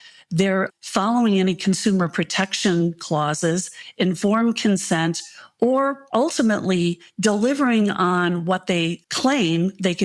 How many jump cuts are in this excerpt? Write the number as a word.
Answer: one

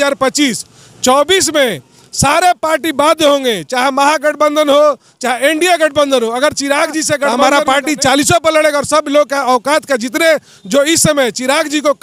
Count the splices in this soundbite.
one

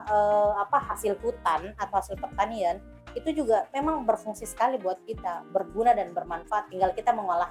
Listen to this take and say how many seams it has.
zero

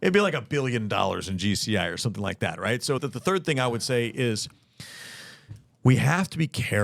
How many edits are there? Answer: one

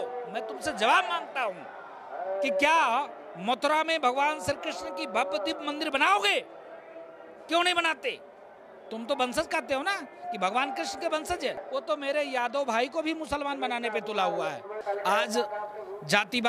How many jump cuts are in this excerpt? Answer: two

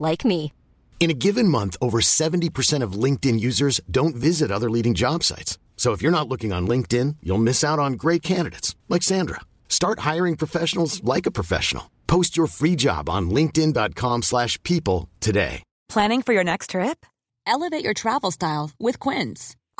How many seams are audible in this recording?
one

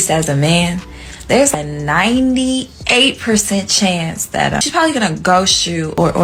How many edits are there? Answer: zero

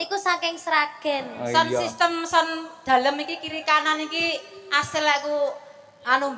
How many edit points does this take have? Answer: one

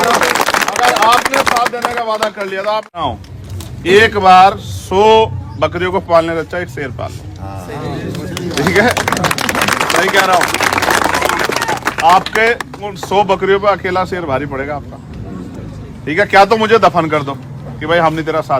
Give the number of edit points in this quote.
one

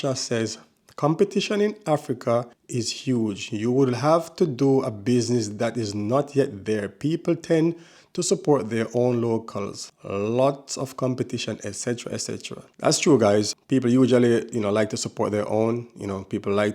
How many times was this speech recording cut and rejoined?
one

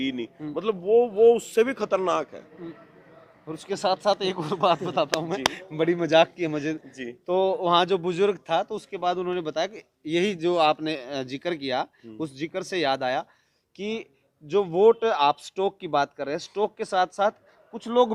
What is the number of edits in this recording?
zero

